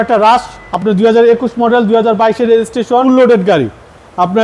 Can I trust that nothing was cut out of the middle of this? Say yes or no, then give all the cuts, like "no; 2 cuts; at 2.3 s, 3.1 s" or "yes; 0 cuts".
no; 1 cut; at 3.0 s